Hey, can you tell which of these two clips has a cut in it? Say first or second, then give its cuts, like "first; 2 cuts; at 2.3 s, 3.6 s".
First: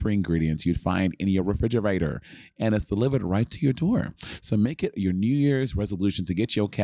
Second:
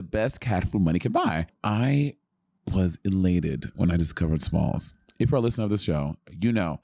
second; 1 cut; at 1.5 s